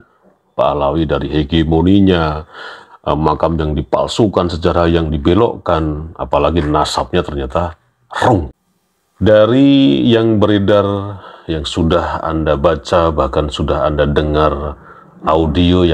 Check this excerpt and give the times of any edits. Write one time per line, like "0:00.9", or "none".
0:08.5